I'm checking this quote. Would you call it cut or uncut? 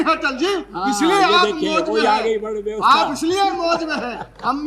uncut